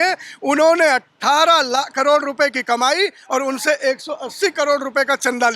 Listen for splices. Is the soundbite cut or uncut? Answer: uncut